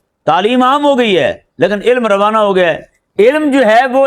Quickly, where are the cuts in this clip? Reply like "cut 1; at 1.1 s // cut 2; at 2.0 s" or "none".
none